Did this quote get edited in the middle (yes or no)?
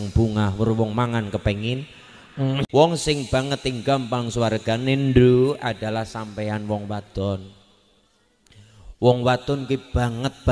yes